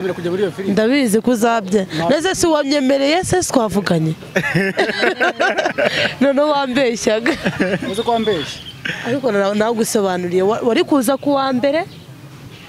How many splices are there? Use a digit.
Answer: 0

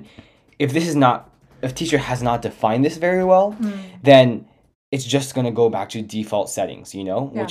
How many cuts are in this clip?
1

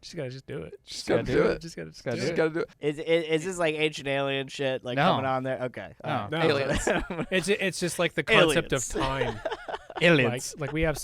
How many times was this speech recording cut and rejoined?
1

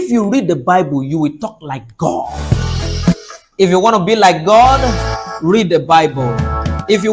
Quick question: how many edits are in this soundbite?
1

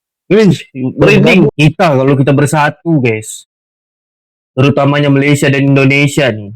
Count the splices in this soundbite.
1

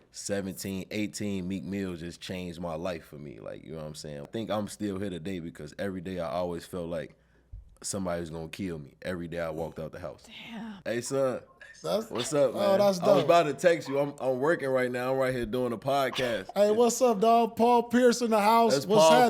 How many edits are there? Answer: 2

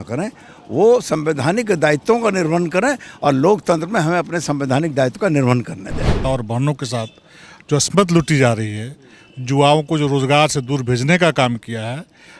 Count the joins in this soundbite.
1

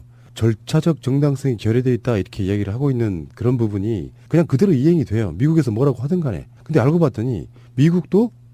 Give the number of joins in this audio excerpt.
0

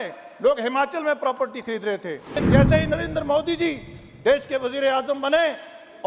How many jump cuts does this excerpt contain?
1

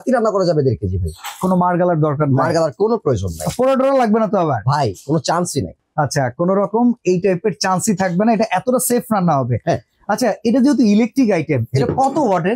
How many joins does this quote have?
0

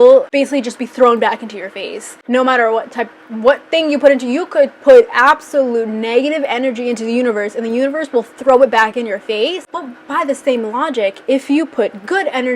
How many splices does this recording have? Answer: 0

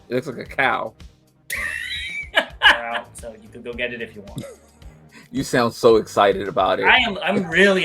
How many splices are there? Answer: 1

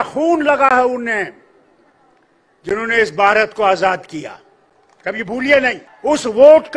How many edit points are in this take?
1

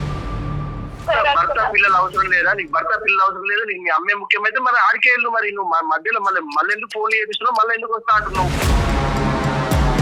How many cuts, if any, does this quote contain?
1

